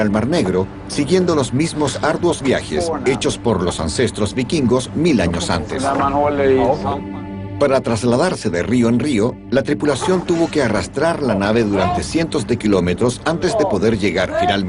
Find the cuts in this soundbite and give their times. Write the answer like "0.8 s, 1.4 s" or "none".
none

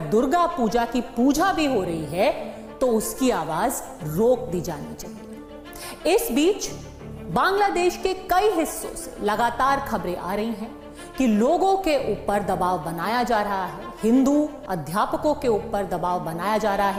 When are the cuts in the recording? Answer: none

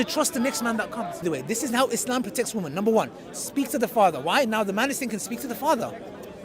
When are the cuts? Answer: 1.2 s

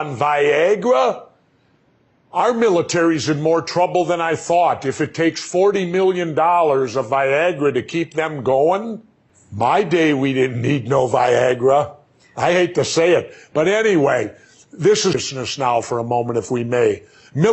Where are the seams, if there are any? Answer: 10.4 s

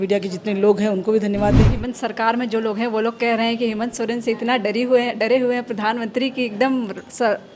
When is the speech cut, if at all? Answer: 1.7 s

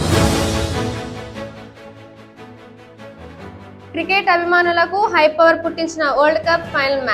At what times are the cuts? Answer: 1.1 s, 3.1 s

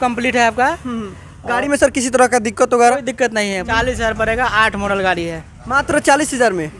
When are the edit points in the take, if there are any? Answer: 3.7 s

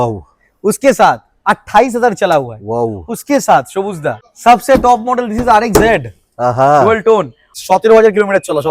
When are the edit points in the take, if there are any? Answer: 4.3 s, 7.5 s

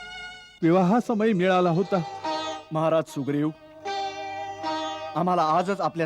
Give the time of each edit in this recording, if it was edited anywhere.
2.1 s

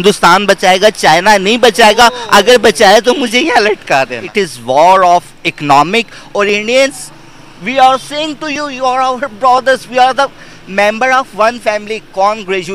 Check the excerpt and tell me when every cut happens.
4.2 s

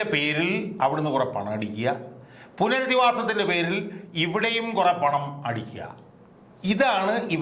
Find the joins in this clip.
none

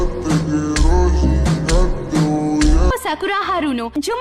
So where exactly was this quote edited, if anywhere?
2.9 s

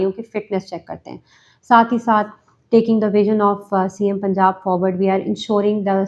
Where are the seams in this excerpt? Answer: none

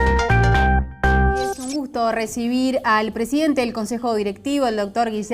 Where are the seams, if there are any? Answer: 1.4 s

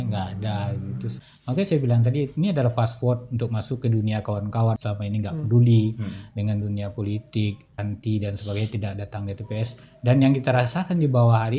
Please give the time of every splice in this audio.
1.3 s, 4.8 s, 7.8 s

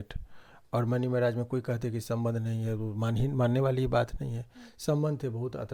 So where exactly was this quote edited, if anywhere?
none

